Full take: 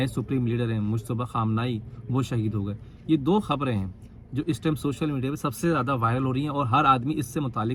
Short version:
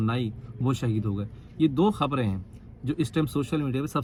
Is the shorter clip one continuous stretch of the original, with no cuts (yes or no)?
yes